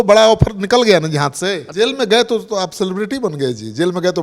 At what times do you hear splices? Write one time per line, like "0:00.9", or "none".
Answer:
0:01.6